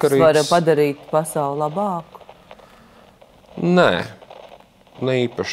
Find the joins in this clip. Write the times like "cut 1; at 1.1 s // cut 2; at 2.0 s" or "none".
none